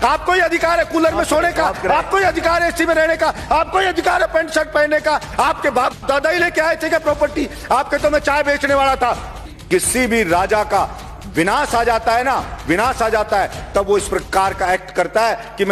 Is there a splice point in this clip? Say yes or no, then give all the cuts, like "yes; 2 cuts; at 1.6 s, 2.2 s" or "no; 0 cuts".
yes; 1 cut; at 9.5 s